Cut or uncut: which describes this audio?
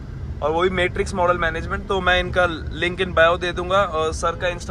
uncut